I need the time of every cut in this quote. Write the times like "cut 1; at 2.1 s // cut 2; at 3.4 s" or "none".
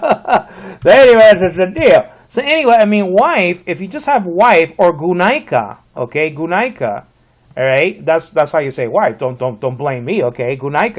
none